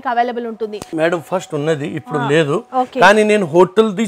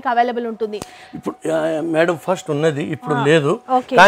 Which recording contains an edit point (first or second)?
first